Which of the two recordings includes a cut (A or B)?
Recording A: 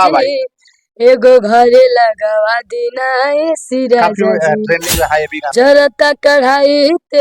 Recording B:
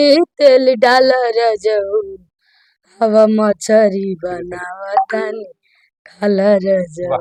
A